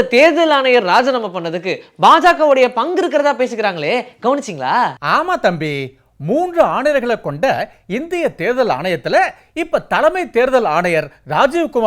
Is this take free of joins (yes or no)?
yes